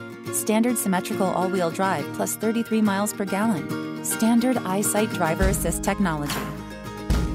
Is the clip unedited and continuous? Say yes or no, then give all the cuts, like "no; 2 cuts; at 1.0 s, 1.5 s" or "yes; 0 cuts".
yes; 0 cuts